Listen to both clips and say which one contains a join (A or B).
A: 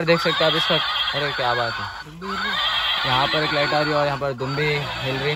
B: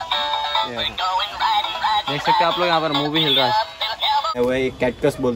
B